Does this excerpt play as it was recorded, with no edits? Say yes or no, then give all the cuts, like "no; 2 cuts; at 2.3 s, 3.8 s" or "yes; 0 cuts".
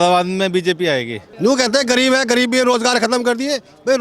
no; 1 cut; at 1.2 s